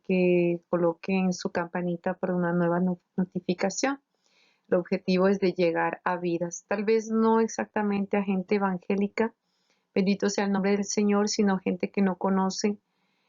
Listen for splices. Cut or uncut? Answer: cut